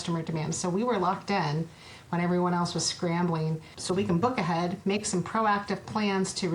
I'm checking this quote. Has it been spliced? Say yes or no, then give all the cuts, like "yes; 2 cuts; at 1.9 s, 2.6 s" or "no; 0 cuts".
yes; 1 cut; at 3.7 s